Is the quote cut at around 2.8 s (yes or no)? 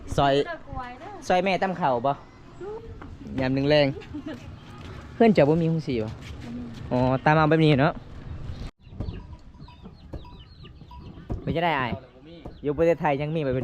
yes